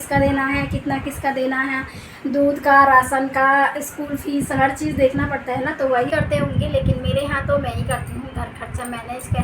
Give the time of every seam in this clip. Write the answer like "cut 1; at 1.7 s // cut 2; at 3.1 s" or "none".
cut 1; at 6.1 s